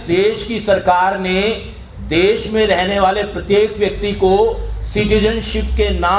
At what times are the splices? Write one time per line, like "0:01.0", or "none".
none